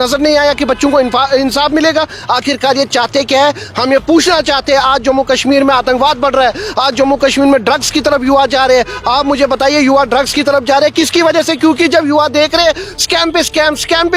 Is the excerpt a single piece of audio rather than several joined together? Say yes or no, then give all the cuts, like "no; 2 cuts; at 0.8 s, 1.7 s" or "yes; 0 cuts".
yes; 0 cuts